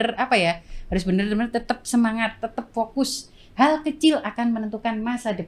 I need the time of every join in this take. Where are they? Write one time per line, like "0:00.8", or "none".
none